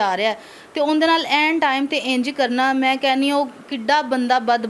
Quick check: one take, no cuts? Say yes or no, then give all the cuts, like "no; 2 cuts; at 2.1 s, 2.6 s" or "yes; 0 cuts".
yes; 0 cuts